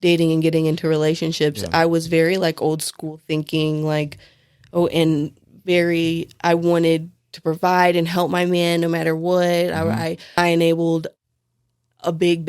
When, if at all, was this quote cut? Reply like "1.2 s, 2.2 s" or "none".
10.4 s

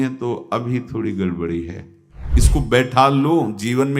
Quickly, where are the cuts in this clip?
2.4 s

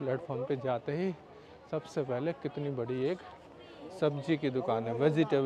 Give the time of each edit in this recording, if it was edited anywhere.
none

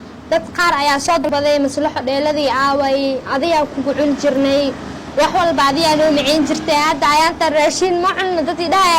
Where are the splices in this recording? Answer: 1.2 s

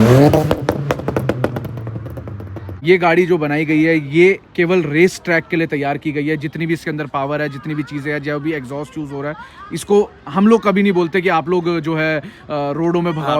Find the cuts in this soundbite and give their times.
2.6 s

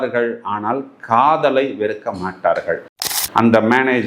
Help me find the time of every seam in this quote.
3.0 s

